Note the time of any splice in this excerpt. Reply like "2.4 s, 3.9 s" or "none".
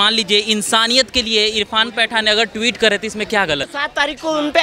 3.7 s

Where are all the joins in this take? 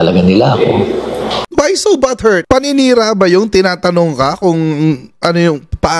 1.5 s

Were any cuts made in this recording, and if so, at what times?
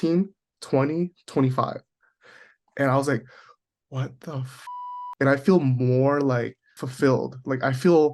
6.8 s

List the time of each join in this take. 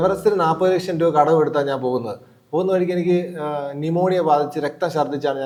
none

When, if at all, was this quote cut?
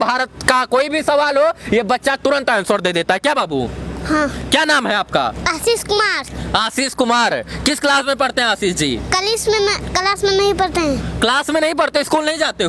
none

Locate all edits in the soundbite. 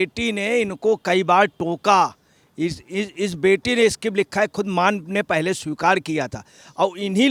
none

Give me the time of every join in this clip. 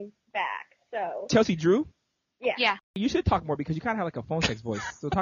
1.3 s, 3.0 s

